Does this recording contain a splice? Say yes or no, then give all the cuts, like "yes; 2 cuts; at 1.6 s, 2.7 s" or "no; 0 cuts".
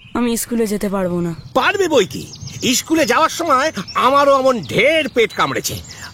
no; 0 cuts